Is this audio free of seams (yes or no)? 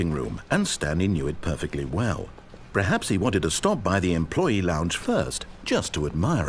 yes